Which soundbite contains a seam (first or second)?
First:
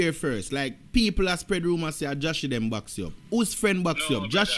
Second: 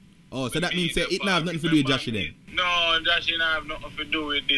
second